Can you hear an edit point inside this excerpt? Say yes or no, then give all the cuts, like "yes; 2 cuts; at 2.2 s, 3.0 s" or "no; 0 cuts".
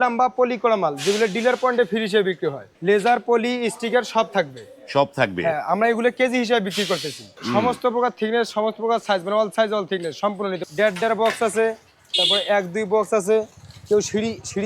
yes; 3 cuts; at 2.7 s, 7.4 s, 10.6 s